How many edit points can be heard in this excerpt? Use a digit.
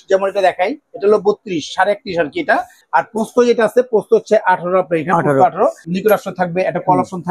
2